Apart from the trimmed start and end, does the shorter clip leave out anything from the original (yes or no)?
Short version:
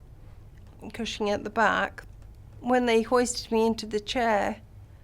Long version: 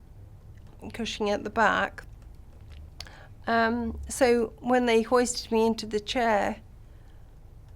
yes